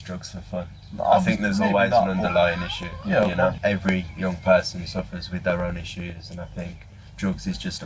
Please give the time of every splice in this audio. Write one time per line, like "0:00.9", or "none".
0:03.6